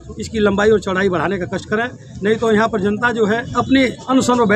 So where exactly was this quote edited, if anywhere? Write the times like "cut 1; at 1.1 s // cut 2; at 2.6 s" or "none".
cut 1; at 3.5 s

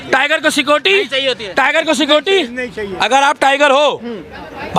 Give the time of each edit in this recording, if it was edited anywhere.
none

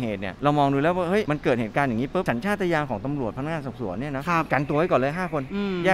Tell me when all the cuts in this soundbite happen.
none

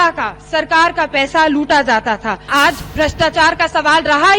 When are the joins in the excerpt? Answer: cut 1; at 2.5 s

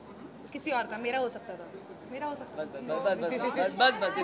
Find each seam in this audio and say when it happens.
none

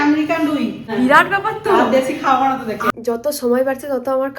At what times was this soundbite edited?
cut 1; at 0.9 s // cut 2; at 2.9 s

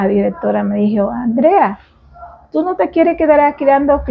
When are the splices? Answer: none

